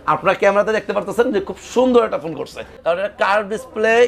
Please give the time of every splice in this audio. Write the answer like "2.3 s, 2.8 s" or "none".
2.7 s